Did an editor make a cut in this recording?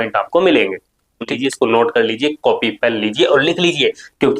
yes; 1 cut; at 1.3 s

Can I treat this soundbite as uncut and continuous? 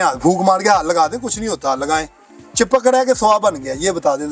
yes; 0 cuts

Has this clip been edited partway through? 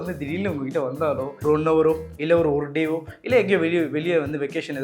yes; 1 cut; at 1.4 s

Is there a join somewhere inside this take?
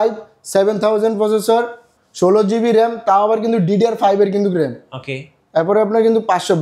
no; 0 cuts

